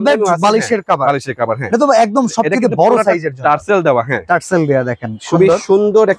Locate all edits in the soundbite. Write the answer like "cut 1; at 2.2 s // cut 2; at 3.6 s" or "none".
none